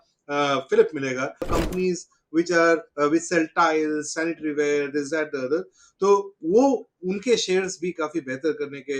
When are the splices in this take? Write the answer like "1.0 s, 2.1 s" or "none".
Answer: 1.5 s